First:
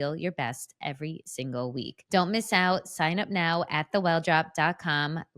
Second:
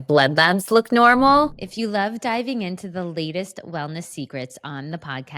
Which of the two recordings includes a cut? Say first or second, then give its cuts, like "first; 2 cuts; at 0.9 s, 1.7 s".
second; 1 cut; at 1.6 s